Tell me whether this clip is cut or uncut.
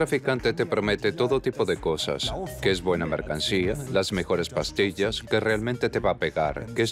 uncut